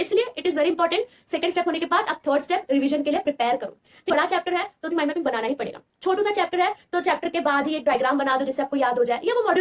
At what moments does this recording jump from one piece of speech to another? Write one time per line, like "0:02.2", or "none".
none